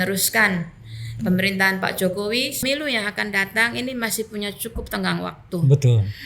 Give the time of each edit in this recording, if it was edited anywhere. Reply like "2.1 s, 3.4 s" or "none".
2.6 s